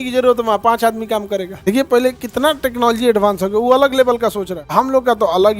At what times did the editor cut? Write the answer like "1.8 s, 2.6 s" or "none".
1.6 s, 4.6 s

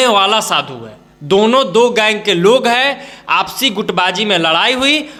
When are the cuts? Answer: none

